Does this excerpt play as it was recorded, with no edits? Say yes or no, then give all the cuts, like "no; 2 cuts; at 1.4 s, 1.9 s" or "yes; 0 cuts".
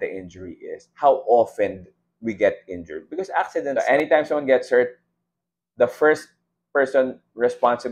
no; 1 cut; at 3.5 s